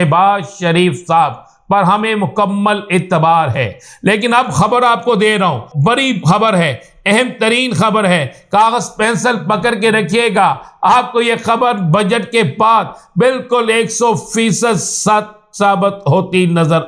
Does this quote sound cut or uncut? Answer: cut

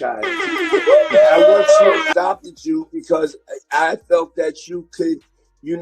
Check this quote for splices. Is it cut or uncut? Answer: cut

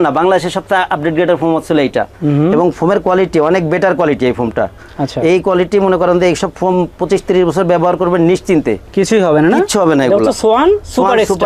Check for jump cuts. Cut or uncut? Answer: uncut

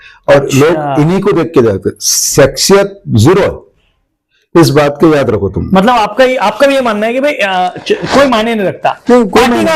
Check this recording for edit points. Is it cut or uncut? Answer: uncut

